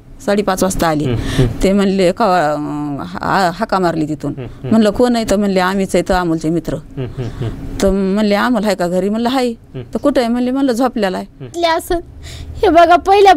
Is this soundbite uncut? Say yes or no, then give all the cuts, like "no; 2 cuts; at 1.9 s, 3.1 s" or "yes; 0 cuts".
no; 1 cut; at 11.6 s